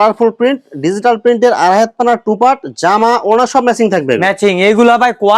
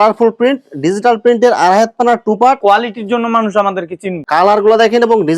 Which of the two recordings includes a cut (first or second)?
second